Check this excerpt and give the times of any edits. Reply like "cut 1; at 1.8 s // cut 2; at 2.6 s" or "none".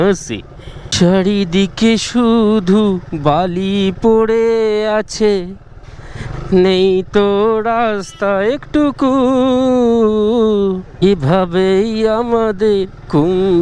none